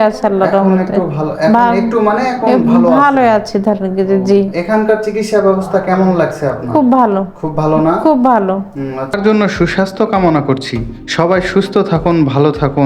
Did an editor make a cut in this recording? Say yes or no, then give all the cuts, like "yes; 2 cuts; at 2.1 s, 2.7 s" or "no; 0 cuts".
yes; 1 cut; at 9.2 s